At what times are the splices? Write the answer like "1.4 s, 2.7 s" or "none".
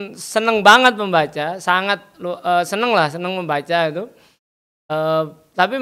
none